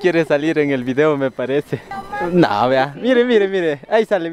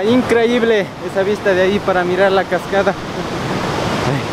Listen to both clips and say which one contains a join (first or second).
first